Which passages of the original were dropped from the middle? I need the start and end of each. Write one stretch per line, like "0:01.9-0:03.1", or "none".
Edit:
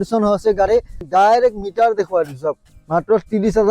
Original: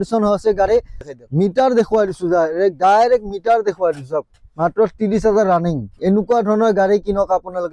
0:01.1-0:02.8